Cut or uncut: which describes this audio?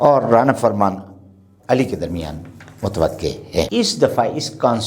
cut